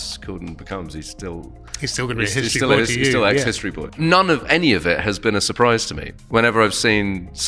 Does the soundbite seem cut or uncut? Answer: cut